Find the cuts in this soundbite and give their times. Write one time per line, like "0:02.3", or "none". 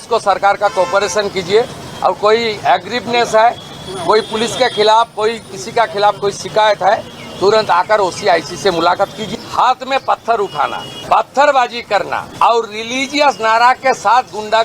0:09.2
0:10.9
0:12.3